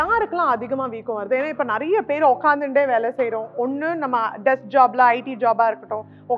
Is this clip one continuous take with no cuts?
yes; 0 cuts

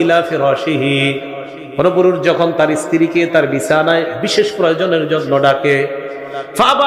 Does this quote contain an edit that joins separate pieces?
no; 0 cuts

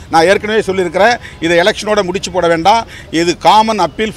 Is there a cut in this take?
no; 0 cuts

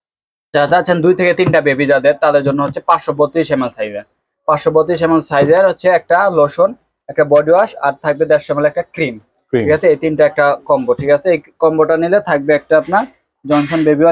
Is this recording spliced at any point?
no; 0 cuts

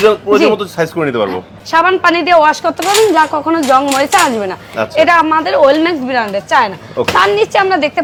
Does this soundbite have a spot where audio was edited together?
no; 0 cuts

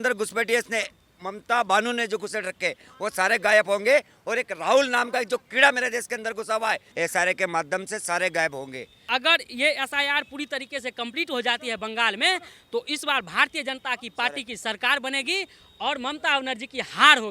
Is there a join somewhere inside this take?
yes; 2 cuts; at 6.9 s, 9.0 s

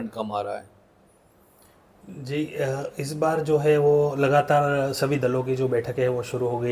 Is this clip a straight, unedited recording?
yes; 0 cuts

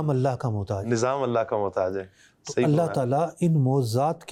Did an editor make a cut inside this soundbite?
no; 0 cuts

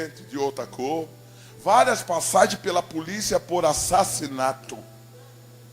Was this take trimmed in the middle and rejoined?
no; 0 cuts

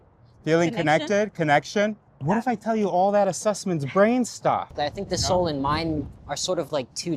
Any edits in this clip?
yes; 2 cuts; at 2.1 s, 4.7 s

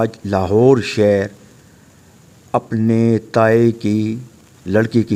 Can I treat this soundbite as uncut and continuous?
yes; 0 cuts

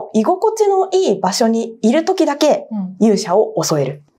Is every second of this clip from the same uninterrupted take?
yes; 0 cuts

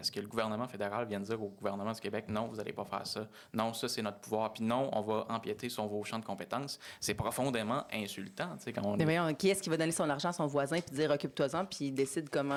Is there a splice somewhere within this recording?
no; 0 cuts

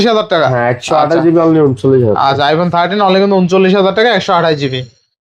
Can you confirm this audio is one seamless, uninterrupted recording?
yes; 0 cuts

